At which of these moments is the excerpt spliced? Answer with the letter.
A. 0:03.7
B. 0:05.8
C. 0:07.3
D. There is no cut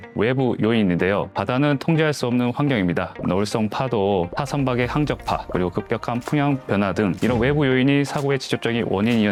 D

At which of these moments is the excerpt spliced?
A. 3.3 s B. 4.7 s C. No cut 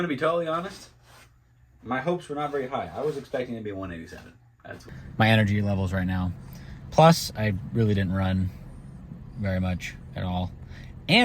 B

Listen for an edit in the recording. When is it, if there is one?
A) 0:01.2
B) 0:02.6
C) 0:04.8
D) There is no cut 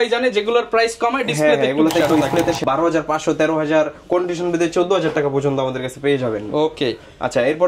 B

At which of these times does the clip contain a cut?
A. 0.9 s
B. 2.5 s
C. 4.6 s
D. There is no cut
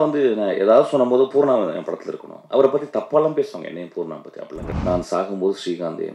C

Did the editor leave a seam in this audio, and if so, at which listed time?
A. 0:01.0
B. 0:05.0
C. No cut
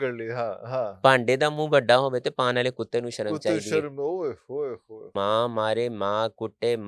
B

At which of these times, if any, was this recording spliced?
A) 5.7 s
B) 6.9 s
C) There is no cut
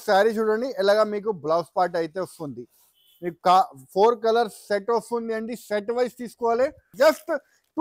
B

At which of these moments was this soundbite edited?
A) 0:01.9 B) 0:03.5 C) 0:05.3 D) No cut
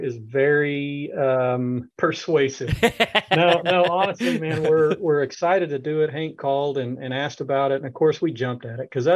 A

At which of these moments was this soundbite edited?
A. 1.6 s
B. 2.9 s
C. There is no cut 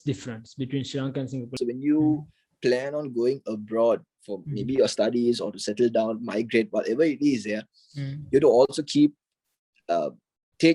A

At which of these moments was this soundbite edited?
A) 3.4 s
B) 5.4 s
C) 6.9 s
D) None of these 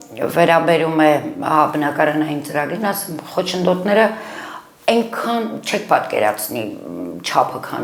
D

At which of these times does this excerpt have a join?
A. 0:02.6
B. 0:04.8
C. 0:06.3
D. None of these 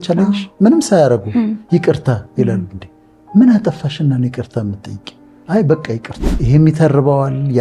C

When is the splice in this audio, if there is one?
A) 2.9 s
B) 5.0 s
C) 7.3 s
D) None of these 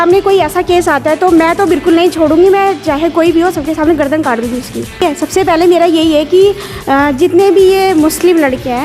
B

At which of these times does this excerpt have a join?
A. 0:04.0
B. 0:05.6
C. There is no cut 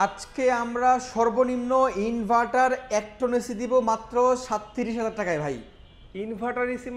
C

